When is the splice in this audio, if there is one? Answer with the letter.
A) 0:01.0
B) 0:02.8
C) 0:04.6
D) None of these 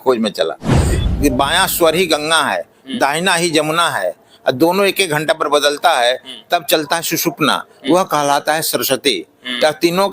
A